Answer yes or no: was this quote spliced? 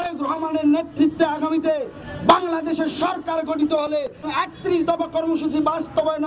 yes